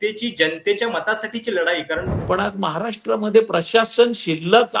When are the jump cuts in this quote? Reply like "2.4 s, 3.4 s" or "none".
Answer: 2.1 s